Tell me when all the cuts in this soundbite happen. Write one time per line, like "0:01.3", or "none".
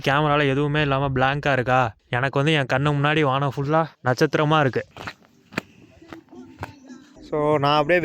0:04.9
0:07.2